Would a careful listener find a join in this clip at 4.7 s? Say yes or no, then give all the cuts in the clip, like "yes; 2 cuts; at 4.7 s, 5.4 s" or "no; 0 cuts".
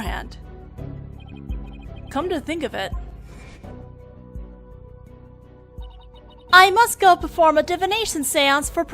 no; 1 cut; at 2.1 s